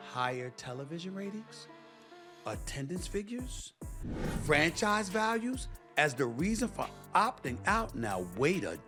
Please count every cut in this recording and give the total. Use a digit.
0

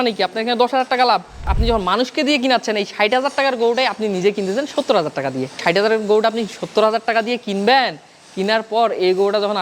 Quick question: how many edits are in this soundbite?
2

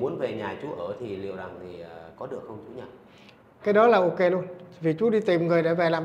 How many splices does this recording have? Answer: 0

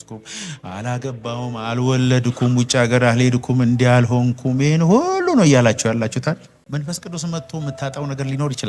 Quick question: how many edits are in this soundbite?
1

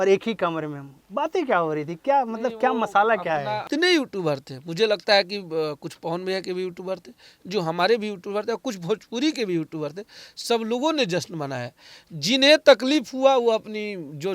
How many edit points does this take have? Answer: 1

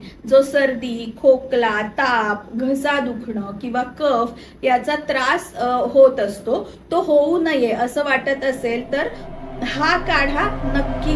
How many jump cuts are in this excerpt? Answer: 0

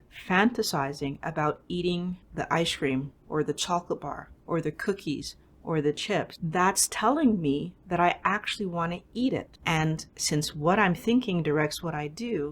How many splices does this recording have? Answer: 3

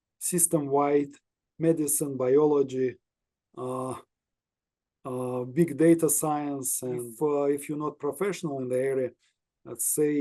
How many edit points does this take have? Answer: 1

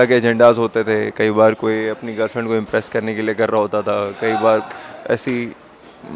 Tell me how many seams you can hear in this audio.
0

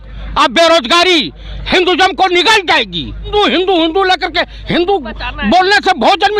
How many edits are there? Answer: 1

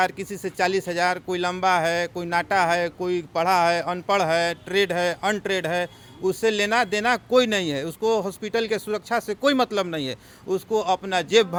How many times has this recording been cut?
0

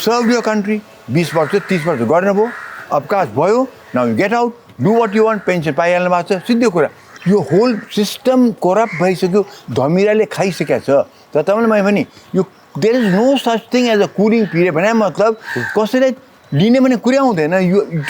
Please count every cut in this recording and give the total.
1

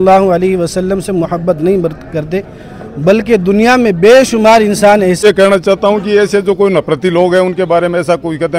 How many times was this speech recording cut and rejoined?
1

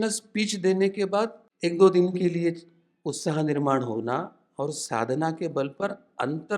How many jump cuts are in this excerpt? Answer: 1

